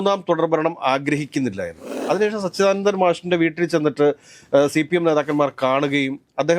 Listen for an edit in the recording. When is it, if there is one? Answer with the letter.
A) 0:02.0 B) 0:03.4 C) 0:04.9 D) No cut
A